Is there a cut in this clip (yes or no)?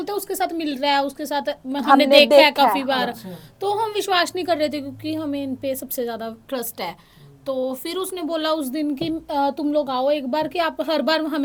no